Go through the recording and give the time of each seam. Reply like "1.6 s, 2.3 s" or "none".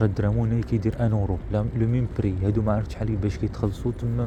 none